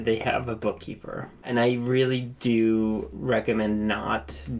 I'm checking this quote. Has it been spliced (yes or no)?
yes